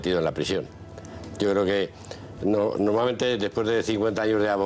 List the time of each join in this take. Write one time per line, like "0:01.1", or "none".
none